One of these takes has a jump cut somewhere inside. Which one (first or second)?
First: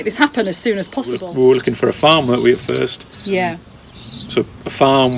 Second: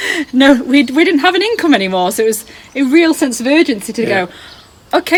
first